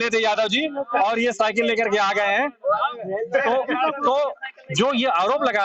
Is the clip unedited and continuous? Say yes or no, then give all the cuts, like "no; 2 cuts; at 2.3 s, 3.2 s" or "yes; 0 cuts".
yes; 0 cuts